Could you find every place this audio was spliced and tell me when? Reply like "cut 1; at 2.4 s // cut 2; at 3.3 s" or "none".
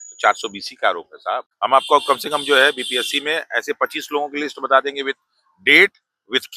cut 1; at 1.5 s